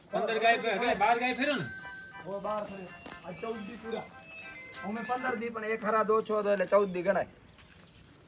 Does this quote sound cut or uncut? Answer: uncut